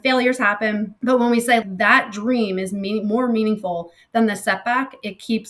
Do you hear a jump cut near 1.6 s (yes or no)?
yes